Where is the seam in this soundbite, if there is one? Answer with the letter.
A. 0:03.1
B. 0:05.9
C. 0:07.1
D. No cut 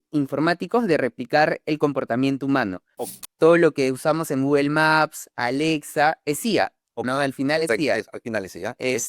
A